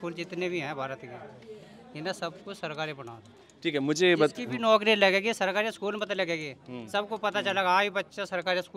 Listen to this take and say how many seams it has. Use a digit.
0